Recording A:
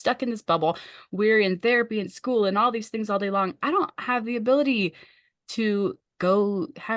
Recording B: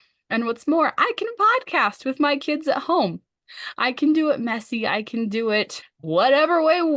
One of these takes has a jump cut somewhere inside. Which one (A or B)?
B